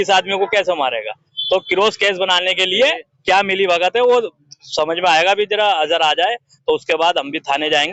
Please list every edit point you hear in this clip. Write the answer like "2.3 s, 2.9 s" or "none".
none